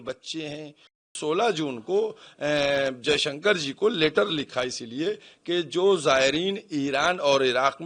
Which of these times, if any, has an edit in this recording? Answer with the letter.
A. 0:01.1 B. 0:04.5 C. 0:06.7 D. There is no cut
A